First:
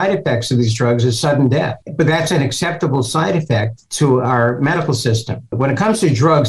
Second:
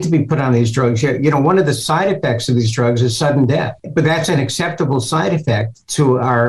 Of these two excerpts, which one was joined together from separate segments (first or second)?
first